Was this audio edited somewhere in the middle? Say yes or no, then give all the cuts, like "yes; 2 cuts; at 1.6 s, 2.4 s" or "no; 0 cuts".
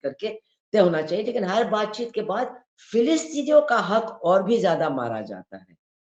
no; 0 cuts